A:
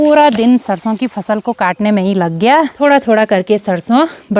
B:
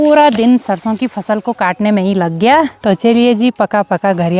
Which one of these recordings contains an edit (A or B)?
A